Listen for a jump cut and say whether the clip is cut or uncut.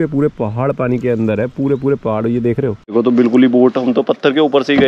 cut